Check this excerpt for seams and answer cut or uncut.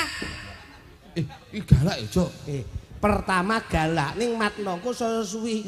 uncut